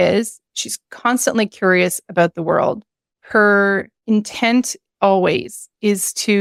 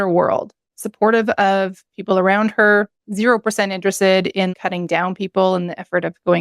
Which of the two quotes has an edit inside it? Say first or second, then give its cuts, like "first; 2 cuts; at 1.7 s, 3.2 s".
second; 1 cut; at 4.5 s